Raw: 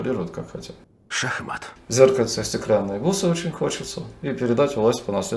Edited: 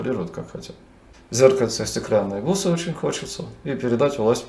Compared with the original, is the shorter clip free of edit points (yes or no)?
no